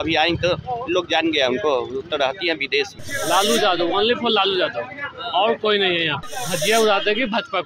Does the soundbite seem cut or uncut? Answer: cut